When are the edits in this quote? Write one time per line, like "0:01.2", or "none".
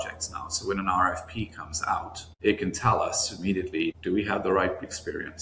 0:02.2
0:04.0